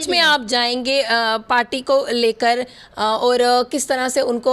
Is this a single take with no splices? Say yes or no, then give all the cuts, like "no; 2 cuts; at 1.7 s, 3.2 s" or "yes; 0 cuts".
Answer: yes; 0 cuts